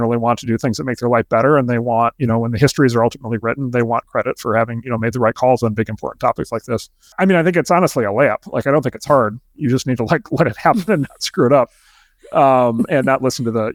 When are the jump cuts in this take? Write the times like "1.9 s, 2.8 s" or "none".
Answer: none